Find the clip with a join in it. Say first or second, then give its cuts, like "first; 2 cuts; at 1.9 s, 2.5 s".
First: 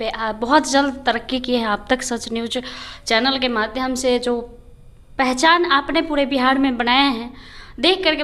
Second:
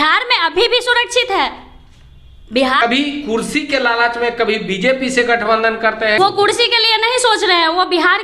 second; 2 cuts; at 2.8 s, 6.2 s